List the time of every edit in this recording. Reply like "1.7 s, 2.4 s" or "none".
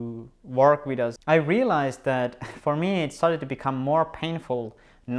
1.2 s